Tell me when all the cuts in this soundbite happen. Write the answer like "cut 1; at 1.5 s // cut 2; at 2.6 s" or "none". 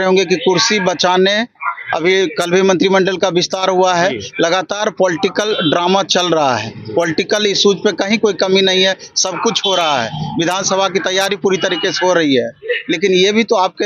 none